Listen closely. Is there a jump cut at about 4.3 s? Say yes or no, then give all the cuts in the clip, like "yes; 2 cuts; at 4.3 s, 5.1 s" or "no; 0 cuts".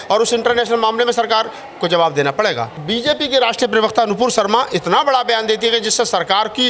no; 1 cut; at 2.7 s